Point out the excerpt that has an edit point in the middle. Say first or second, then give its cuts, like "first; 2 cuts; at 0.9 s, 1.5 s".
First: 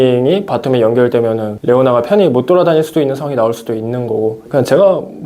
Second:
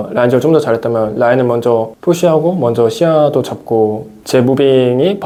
first; 1 cut; at 1.5 s